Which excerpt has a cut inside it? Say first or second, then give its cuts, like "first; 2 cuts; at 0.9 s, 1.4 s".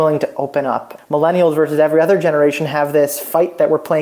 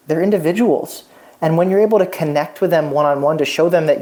first; 1 cut; at 0.9 s